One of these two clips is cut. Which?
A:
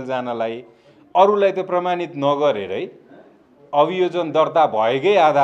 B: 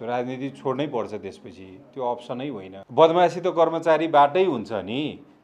B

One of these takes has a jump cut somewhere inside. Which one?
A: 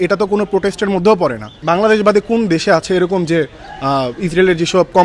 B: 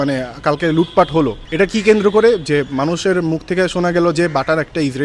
A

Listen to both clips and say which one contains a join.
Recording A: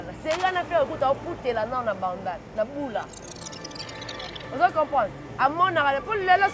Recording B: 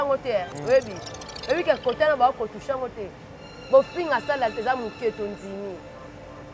A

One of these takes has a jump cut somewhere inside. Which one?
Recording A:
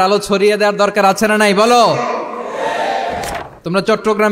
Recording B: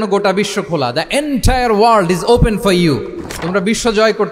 A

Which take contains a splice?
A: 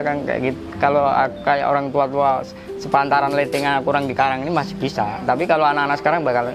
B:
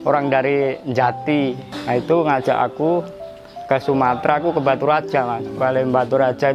B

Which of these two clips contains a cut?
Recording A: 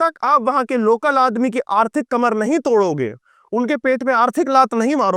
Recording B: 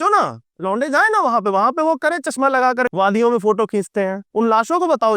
B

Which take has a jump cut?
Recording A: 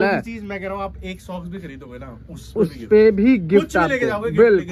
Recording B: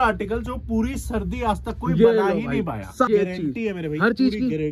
B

